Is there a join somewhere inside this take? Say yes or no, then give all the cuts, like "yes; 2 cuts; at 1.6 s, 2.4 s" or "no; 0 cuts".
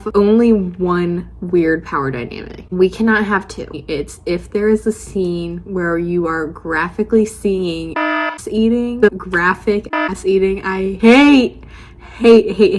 yes; 2 cuts; at 3.7 s, 9.1 s